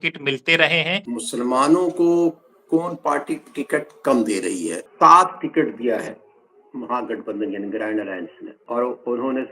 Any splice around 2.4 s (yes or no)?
no